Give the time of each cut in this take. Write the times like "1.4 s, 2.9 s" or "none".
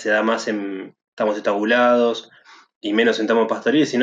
none